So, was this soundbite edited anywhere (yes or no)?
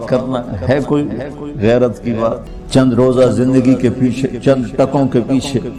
no